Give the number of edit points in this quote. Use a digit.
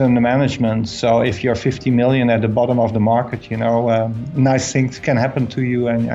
0